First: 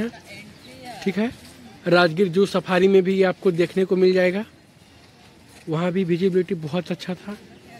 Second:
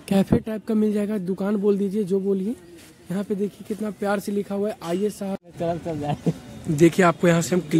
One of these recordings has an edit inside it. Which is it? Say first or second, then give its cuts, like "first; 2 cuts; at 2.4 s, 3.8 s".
second; 1 cut; at 5.4 s